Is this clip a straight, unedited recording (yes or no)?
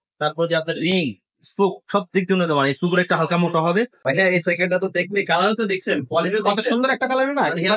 no